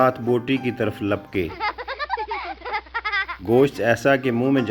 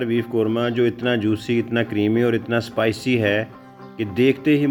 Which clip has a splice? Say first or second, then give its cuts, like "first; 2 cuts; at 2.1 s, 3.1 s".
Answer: first; 2 cuts; at 1.5 s, 3.3 s